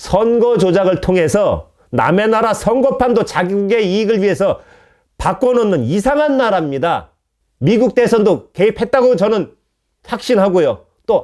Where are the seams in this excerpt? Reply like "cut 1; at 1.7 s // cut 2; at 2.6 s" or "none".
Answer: none